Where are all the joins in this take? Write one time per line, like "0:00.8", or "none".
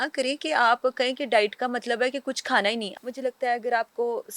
0:02.9